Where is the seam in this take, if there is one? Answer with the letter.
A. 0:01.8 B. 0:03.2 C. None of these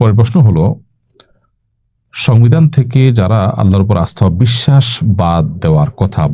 C